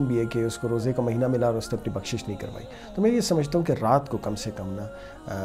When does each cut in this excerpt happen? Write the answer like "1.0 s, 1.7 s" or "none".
none